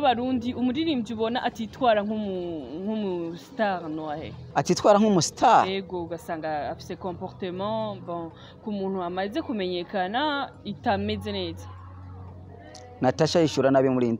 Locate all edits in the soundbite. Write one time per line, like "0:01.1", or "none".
0:04.4

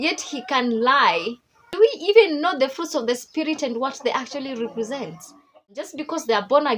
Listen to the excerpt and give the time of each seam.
0:05.9

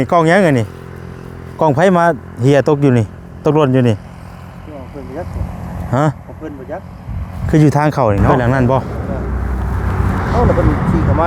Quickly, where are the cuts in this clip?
0:08.3

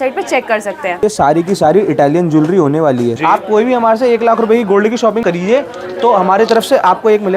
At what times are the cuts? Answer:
0:01.0
0:03.2
0:05.2

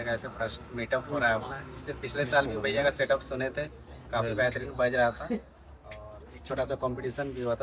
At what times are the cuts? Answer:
none

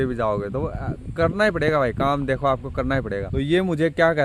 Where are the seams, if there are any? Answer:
0:03.3

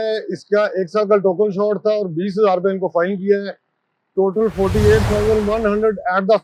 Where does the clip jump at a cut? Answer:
none

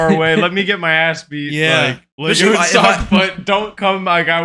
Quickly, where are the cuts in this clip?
0:02.1

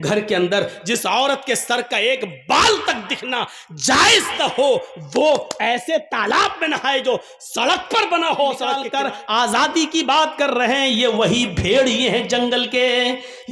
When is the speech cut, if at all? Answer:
0:08.8

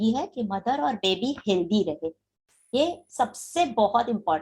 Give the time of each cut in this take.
none

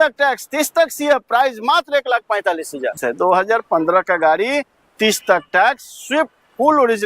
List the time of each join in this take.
0:02.9

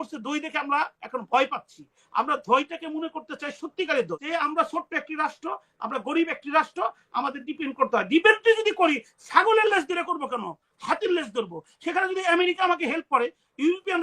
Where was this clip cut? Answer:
0:04.2

